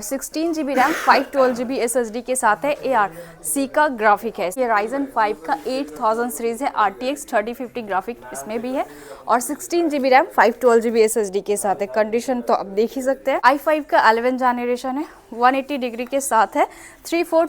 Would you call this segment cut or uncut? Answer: cut